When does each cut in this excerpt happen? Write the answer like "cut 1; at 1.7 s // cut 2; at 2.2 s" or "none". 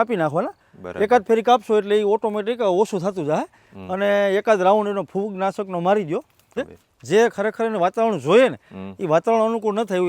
cut 1; at 6.5 s